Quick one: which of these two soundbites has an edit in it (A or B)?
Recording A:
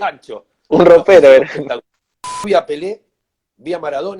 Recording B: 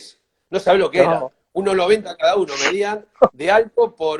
A